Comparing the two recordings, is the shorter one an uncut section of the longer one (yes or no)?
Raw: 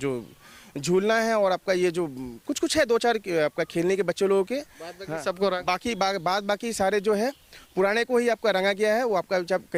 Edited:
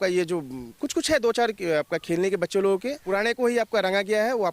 no